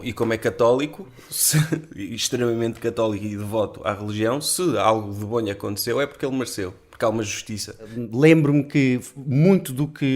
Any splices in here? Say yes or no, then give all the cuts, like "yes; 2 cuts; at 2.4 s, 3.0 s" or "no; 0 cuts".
yes; 1 cut; at 8.0 s